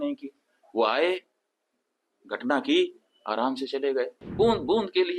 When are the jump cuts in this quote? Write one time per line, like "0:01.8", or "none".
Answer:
0:04.2